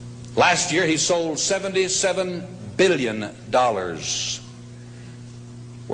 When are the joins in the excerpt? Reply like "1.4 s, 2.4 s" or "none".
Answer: 2.7 s